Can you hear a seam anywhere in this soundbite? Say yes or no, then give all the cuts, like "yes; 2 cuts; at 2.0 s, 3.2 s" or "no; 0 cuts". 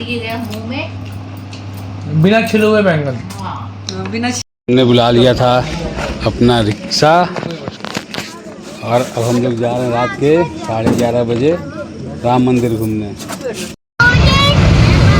yes; 2 cuts; at 4.4 s, 13.9 s